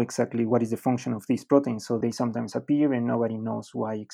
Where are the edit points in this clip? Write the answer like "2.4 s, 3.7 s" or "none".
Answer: none